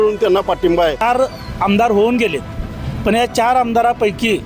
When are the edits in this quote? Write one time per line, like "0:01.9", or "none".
0:01.0